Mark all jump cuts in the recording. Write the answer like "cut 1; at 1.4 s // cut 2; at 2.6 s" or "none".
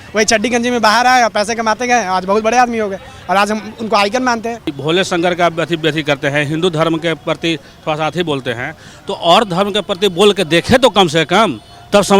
cut 1; at 4.8 s